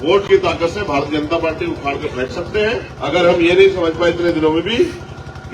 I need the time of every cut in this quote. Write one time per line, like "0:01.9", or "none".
0:02.9